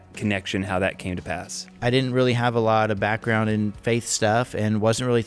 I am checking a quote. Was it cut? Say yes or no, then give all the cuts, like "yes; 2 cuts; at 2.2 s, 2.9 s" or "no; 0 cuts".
yes; 1 cut; at 1.7 s